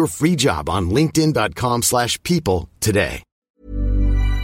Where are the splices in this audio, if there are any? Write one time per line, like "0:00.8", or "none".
0:03.4